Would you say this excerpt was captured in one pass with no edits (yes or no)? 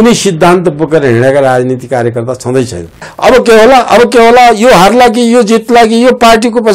no